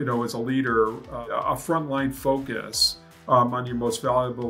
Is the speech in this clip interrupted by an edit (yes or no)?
yes